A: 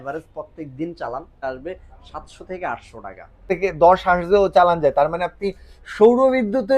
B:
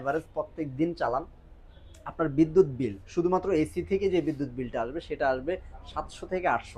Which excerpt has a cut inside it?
A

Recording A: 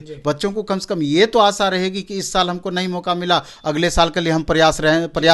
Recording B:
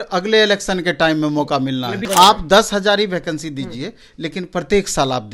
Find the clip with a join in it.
B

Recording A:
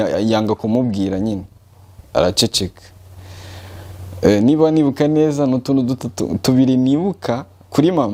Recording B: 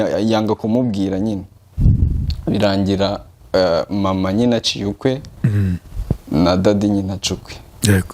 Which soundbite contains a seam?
B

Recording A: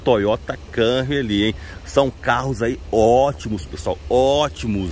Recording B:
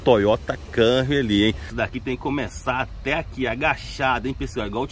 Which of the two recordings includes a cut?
B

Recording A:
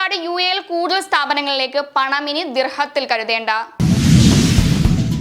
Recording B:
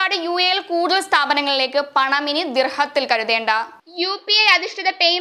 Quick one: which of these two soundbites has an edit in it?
A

